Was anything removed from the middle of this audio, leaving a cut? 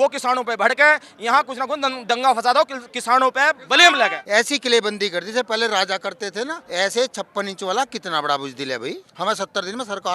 yes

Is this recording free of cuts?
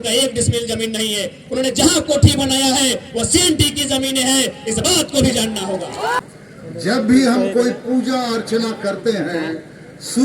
no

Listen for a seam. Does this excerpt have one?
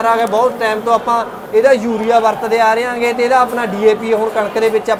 no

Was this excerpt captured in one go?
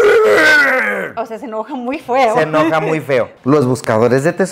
no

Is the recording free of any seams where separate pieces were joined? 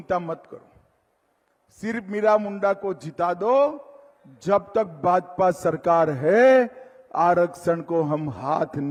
yes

